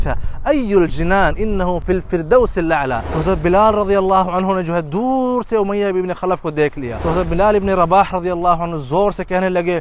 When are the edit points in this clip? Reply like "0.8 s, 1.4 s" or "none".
1.8 s, 3.1 s